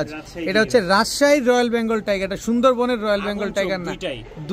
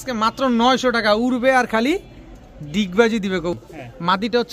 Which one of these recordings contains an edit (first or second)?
second